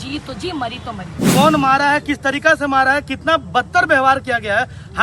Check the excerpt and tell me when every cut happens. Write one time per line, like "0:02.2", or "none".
0:01.2